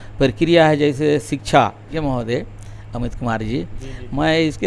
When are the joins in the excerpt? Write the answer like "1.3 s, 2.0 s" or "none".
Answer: 1.9 s

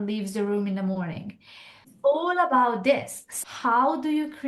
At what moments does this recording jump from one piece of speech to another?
1.9 s

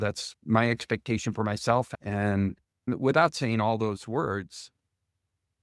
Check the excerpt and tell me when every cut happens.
none

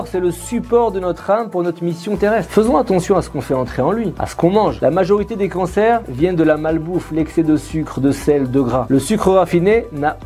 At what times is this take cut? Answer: none

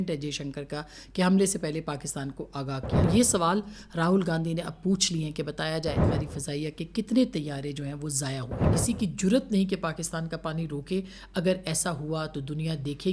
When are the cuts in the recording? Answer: 3.0 s, 6.0 s, 8.7 s

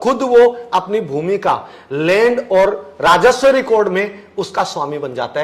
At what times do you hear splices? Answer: none

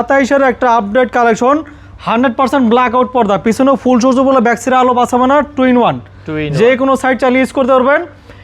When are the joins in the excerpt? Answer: none

